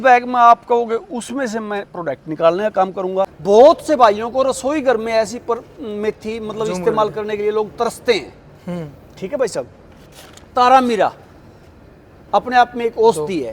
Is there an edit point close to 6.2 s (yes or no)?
no